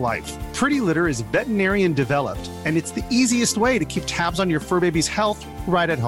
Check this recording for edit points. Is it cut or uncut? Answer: uncut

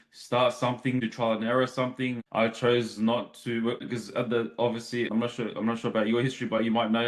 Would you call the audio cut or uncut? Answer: cut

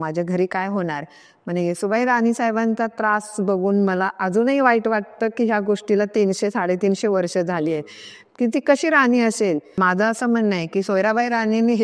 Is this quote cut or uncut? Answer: cut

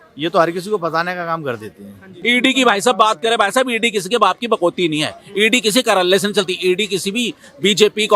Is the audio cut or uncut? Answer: cut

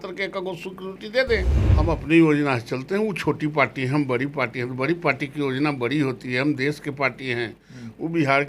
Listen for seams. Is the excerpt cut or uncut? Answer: cut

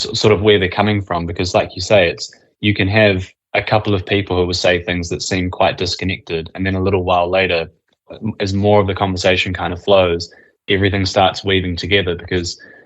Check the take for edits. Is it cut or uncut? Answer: cut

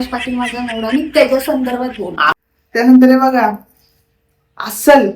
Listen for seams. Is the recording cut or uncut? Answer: cut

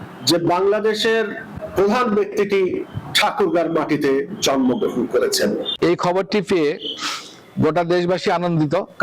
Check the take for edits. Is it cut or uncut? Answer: cut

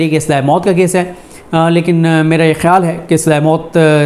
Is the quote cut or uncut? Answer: uncut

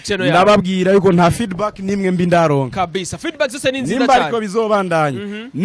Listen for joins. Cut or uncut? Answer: uncut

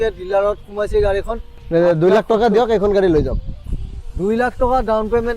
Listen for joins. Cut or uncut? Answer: cut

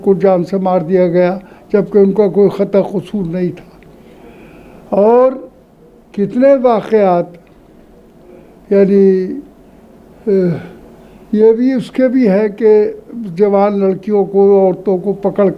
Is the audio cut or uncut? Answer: uncut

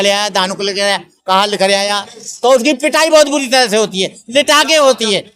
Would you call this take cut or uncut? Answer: uncut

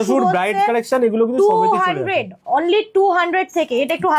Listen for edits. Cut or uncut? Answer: uncut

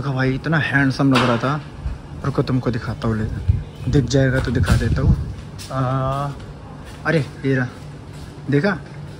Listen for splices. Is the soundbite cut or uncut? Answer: uncut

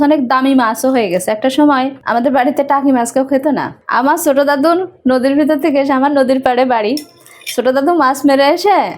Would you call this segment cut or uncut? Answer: cut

